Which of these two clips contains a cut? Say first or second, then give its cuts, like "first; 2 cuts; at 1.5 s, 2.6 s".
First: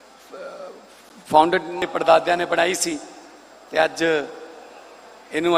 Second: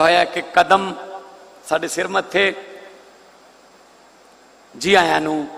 first; 1 cut; at 1.8 s